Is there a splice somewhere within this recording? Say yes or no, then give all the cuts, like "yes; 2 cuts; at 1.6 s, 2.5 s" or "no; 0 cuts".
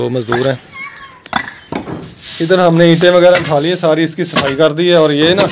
yes; 1 cut; at 2.0 s